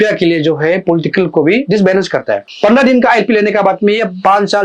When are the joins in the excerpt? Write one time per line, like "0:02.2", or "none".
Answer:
0:02.4